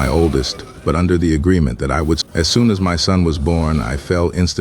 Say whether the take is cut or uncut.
cut